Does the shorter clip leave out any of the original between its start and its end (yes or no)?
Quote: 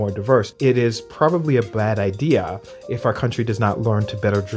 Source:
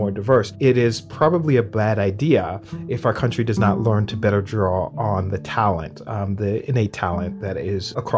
no